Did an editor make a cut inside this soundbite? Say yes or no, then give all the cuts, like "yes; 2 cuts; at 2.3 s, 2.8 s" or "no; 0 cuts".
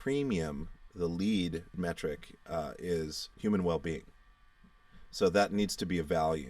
yes; 2 cuts; at 1.8 s, 3.2 s